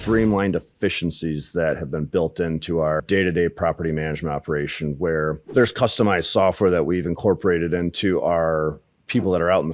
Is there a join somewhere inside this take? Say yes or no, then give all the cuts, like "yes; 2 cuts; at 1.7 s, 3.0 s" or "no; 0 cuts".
yes; 2 cuts; at 3.0 s, 5.4 s